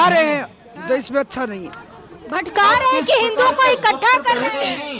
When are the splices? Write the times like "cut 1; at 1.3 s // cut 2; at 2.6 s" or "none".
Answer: none